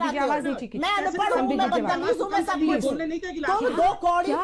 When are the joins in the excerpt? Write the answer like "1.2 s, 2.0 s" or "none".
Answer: none